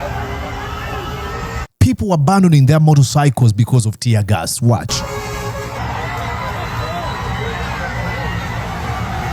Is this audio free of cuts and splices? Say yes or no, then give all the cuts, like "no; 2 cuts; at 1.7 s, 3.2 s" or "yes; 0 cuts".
yes; 0 cuts